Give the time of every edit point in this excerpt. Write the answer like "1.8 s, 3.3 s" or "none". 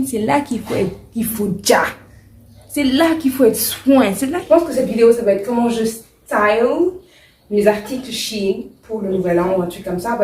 4.4 s